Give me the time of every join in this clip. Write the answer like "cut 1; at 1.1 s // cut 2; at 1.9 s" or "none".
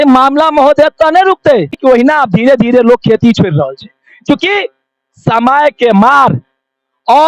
cut 1; at 1.7 s

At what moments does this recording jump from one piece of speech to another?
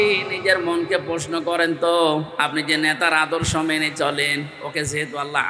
none

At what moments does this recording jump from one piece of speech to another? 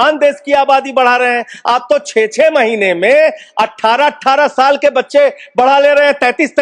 none

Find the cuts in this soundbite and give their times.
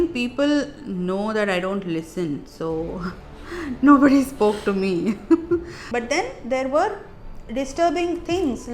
cut 1; at 5.8 s

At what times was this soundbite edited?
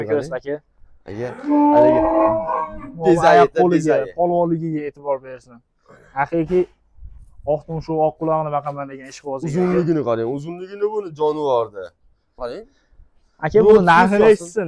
cut 1; at 12.4 s

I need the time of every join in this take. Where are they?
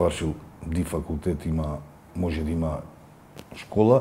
none

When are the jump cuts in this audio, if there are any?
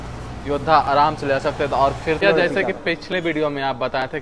cut 1; at 2.2 s

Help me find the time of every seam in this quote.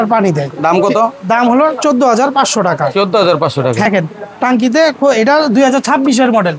cut 1; at 3.9 s

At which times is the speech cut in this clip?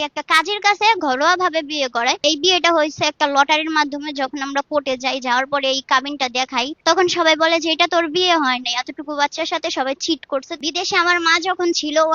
cut 1; at 2.2 s // cut 2; at 6.7 s // cut 3; at 10.6 s

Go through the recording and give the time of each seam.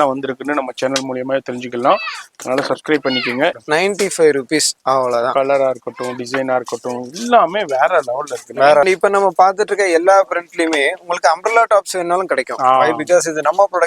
cut 1; at 3.6 s // cut 2; at 8.8 s

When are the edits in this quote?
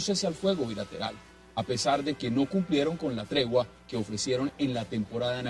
cut 1; at 1.6 s

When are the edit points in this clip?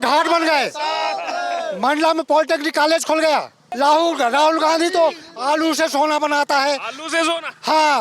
cut 1; at 3.6 s

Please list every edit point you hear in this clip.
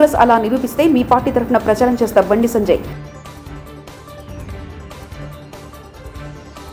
none

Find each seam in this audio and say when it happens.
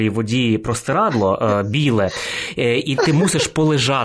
none

